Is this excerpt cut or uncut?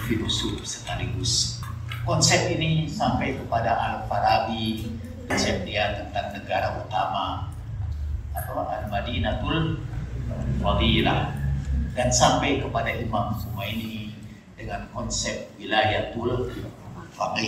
cut